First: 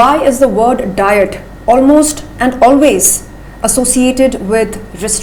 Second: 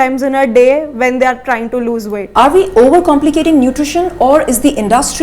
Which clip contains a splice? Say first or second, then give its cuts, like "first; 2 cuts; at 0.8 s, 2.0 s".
second; 1 cut; at 2.2 s